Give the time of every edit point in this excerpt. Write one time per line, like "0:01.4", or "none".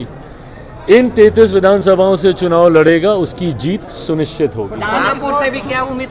none